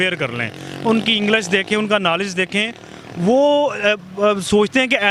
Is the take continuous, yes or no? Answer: yes